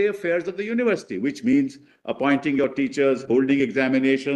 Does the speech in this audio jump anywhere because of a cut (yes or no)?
no